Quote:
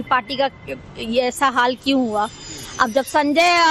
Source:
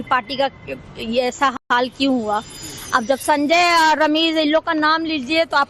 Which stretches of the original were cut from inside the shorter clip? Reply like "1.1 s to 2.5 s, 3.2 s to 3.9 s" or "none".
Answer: 1.5 s to 1.7 s